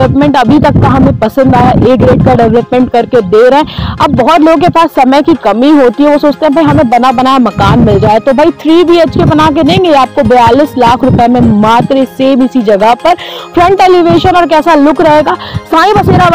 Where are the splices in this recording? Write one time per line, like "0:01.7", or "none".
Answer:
none